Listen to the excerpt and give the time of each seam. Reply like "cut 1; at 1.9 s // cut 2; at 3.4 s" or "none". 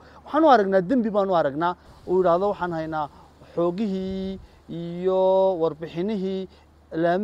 cut 1; at 1.9 s

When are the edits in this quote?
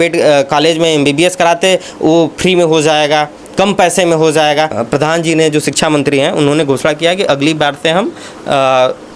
cut 1; at 4.7 s

